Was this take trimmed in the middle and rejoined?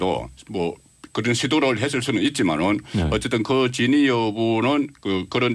yes; 1 cut; at 2.1 s

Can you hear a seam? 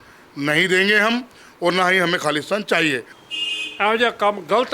yes; 1 cut; at 3.2 s

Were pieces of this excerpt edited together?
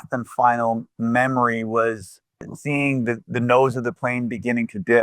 yes; 1 cut; at 2.6 s

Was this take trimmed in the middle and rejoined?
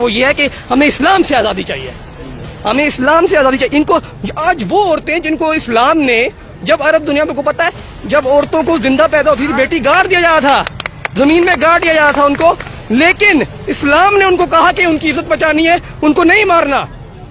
no; 0 cuts

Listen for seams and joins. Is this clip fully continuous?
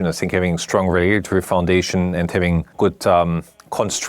no; 1 cut; at 2.7 s

